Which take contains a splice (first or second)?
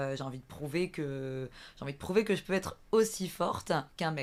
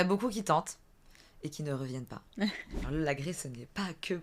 second